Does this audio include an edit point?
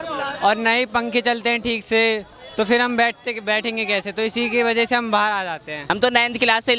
yes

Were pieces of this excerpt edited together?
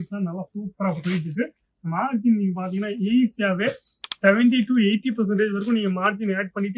no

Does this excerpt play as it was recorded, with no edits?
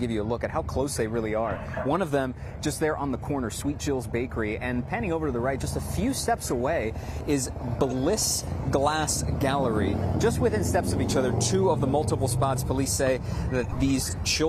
yes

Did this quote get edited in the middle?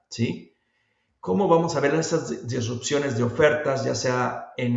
no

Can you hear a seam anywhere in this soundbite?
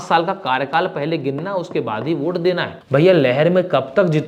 yes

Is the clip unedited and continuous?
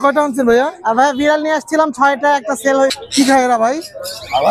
no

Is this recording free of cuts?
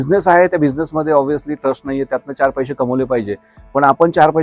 yes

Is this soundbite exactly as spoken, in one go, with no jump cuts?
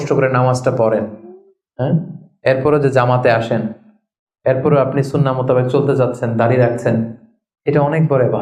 yes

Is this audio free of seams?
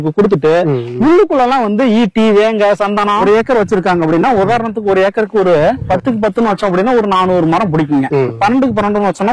no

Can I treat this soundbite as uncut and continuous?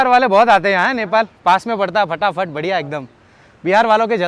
yes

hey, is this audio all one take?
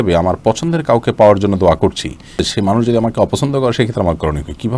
no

